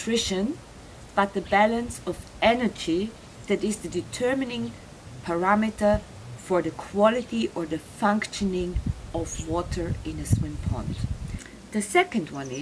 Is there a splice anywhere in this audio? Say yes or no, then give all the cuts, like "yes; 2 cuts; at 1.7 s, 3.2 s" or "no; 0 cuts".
yes; 1 cut; at 11.5 s